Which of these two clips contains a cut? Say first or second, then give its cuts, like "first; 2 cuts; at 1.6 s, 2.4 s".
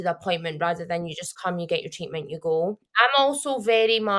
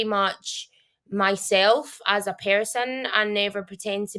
first; 1 cut; at 2.8 s